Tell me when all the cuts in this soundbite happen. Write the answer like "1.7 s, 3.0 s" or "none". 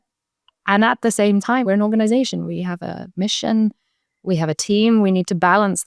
1.6 s